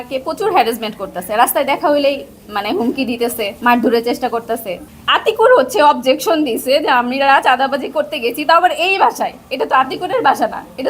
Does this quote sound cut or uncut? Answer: cut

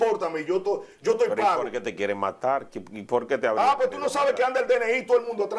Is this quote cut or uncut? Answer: uncut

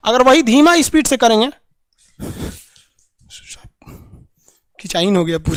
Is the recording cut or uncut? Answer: uncut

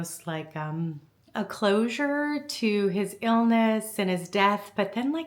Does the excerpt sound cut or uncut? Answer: cut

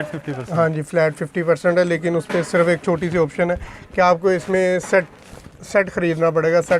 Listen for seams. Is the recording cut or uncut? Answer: uncut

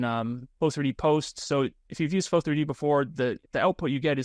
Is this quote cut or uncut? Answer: cut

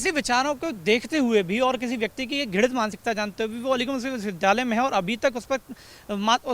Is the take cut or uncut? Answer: uncut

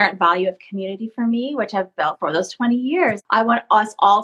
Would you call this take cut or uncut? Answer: cut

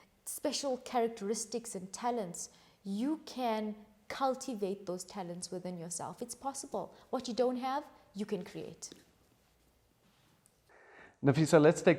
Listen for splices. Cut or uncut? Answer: uncut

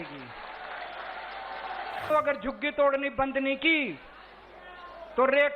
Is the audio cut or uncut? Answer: cut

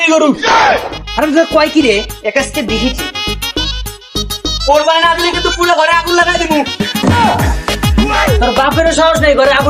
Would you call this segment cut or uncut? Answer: uncut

